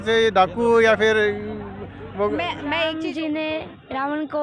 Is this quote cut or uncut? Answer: cut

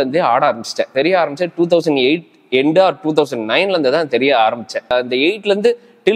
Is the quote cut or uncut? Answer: cut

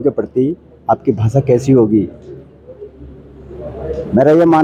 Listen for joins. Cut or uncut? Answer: uncut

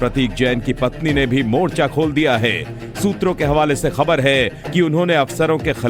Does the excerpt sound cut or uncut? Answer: uncut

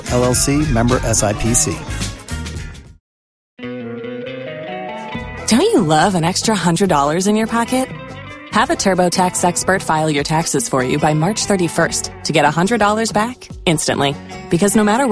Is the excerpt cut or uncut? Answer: cut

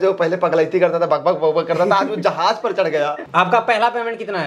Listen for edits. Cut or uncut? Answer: cut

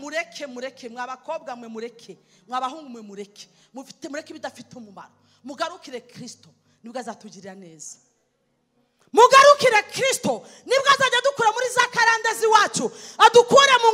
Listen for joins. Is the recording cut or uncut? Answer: uncut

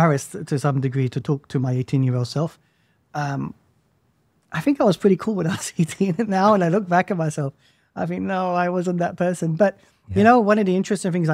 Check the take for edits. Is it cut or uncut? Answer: uncut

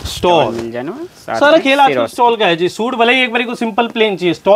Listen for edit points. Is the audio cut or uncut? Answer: uncut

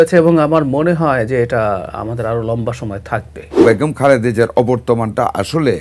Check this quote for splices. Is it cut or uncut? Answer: cut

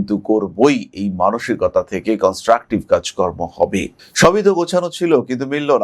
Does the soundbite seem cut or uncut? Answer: cut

